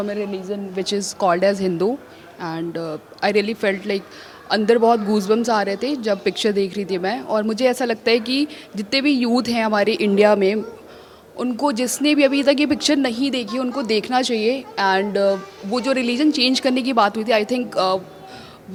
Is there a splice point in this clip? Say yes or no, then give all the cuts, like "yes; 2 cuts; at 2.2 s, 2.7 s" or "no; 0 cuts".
no; 0 cuts